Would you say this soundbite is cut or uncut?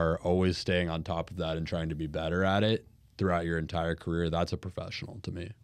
uncut